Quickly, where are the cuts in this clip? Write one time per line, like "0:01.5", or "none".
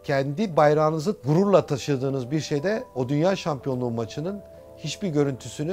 0:01.2